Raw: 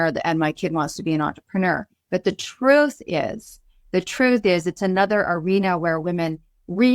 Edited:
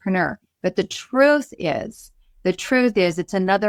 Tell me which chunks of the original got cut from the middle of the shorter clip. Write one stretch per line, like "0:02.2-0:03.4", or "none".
none